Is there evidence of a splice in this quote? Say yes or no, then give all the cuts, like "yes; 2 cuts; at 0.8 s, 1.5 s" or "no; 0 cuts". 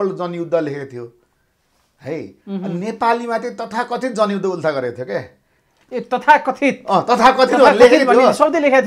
no; 0 cuts